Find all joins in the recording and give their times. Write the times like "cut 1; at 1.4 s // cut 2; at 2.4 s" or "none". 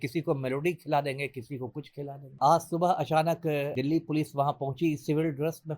cut 1; at 2.4 s // cut 2; at 3.7 s